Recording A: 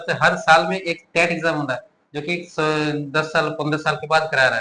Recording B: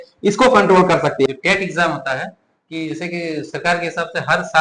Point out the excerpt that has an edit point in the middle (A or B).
B